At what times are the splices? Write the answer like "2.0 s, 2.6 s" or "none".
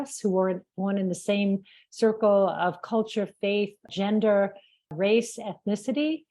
4.9 s